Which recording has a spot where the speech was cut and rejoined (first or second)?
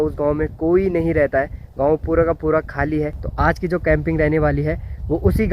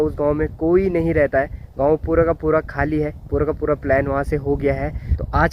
first